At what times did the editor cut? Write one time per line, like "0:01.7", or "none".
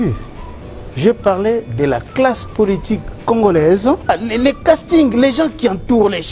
0:04.1